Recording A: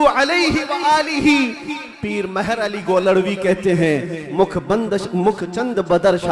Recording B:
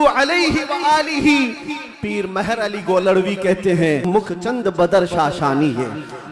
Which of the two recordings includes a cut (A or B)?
B